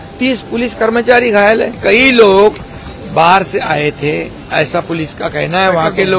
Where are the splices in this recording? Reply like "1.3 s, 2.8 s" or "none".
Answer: 1.8 s